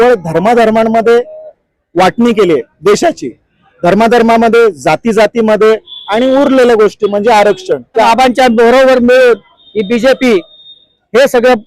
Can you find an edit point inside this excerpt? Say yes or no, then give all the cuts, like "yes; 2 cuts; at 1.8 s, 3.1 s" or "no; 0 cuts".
yes; 1 cut; at 8.1 s